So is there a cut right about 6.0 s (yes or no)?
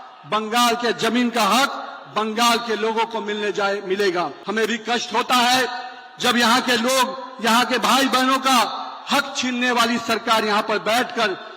no